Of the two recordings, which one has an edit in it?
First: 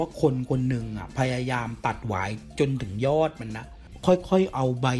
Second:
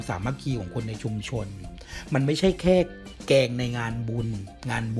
first; 1 cut; at 3.8 s

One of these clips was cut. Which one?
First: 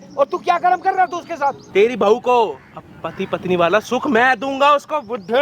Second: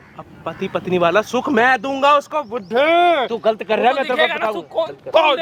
first; 1 cut; at 1.7 s

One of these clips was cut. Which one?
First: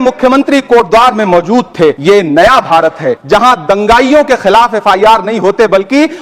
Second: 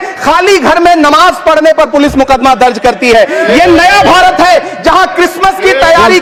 first; 2 cuts; at 2.0 s, 3.2 s

